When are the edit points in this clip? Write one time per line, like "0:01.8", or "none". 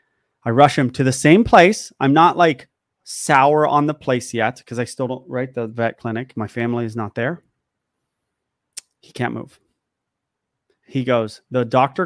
0:06.4